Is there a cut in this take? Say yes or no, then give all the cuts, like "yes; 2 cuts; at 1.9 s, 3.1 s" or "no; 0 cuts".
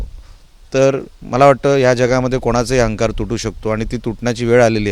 no; 0 cuts